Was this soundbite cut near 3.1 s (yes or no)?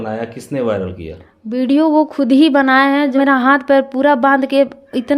yes